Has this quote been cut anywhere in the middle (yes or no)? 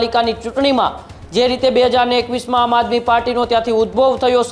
no